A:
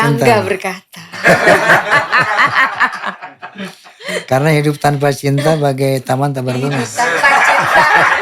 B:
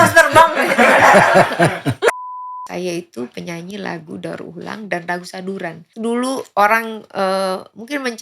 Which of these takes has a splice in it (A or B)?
B